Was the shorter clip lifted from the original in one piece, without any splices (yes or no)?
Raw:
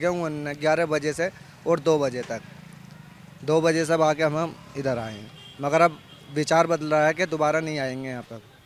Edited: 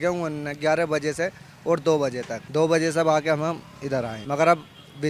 no